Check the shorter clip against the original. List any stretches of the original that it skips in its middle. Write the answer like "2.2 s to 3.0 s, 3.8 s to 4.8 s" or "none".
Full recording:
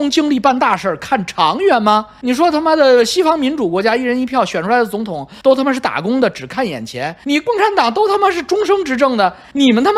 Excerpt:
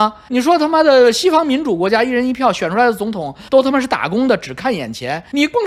none